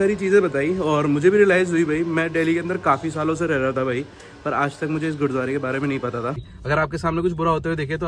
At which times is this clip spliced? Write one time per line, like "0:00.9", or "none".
0:06.5